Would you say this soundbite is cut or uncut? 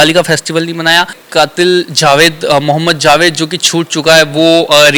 cut